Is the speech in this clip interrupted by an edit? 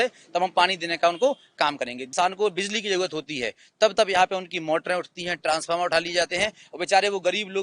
yes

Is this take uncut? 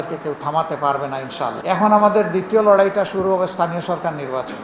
no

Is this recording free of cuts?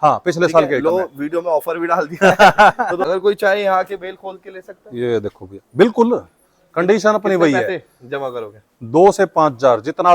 no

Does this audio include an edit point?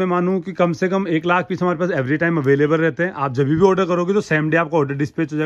no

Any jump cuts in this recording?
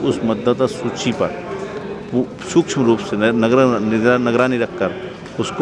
no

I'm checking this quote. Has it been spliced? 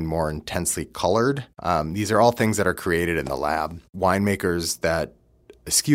yes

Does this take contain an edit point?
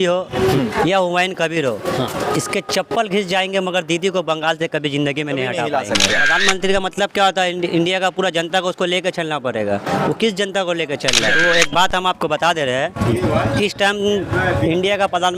yes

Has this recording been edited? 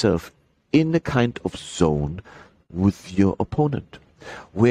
no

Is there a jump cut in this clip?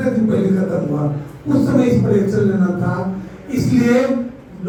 no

